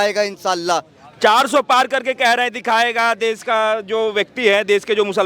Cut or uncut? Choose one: uncut